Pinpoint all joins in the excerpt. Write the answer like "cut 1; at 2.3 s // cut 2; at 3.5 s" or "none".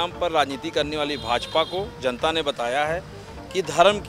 none

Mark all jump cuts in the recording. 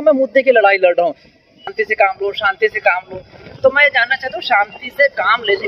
cut 1; at 1.7 s

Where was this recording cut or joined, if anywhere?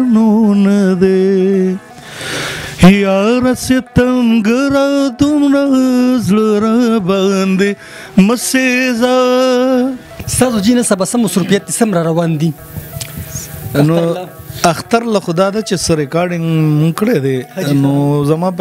cut 1; at 10.2 s

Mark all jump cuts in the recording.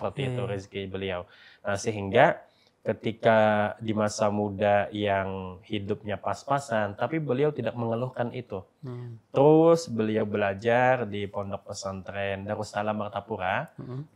none

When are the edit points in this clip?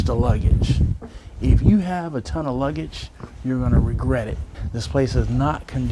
cut 1; at 4.6 s

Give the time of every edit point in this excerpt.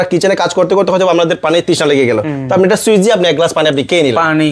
none

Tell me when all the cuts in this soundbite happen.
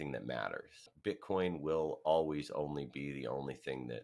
cut 1; at 0.9 s

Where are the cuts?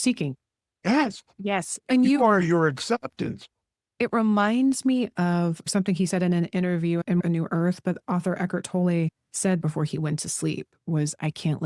cut 1; at 9.6 s

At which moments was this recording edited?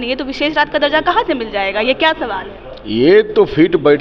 none

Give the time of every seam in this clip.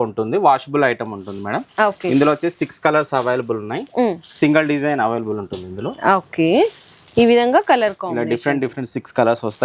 none

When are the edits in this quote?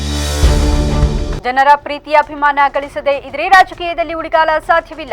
cut 1; at 1.3 s

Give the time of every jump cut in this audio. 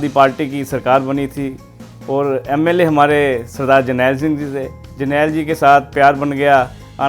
cut 1; at 4.9 s

